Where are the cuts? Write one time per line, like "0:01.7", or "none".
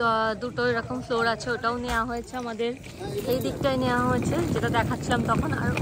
none